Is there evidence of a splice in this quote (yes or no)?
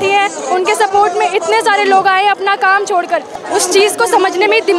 yes